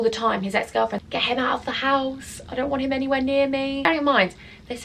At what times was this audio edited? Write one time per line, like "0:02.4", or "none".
0:01.0
0:03.8